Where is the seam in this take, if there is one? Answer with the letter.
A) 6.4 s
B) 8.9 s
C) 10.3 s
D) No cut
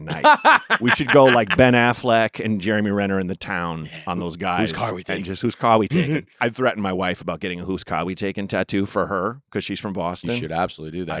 A